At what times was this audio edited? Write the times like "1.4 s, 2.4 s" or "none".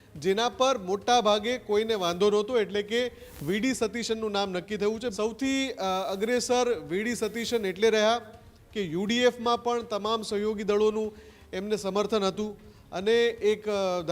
5.1 s